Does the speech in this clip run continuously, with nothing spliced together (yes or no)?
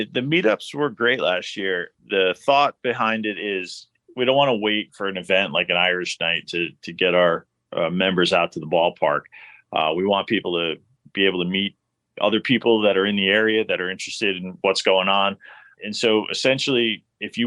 no